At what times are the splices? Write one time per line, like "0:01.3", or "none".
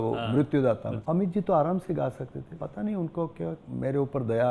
0:00.9
0:02.5
0:03.6